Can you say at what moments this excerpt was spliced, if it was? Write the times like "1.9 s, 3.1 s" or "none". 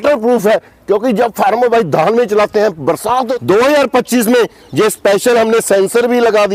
3.3 s